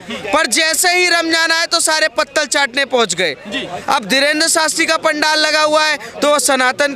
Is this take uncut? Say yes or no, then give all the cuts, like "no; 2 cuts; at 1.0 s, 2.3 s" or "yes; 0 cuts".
yes; 0 cuts